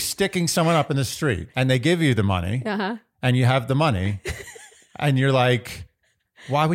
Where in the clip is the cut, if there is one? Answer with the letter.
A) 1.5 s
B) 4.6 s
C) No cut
A